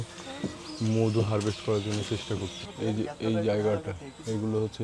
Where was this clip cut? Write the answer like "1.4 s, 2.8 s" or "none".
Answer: 2.6 s